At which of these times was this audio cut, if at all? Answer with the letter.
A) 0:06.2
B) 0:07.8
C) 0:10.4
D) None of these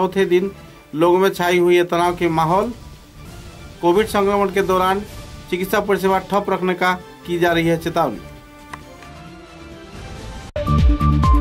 C